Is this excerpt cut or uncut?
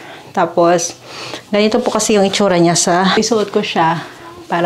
cut